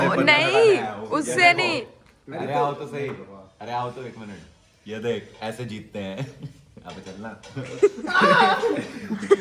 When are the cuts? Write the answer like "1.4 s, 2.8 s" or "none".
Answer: none